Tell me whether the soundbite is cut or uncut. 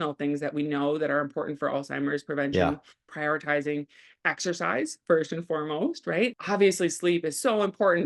cut